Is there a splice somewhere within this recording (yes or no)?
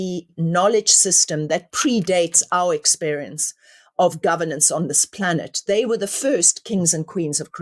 no